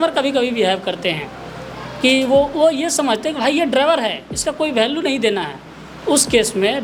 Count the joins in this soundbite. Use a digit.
0